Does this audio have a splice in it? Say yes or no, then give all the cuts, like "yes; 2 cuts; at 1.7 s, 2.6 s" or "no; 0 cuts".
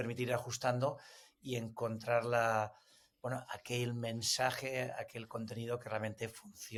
no; 0 cuts